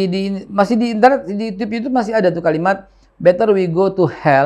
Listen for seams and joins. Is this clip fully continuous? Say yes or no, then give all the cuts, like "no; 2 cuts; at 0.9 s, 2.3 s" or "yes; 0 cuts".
yes; 0 cuts